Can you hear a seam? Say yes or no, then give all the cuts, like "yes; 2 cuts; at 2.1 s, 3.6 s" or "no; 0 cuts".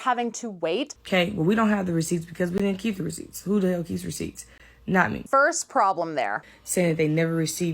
yes; 3 cuts; at 1.0 s, 5.2 s, 6.4 s